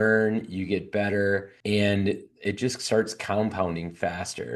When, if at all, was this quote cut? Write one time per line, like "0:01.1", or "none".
0:01.5